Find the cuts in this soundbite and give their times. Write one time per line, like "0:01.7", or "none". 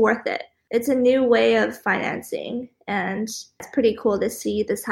0:03.6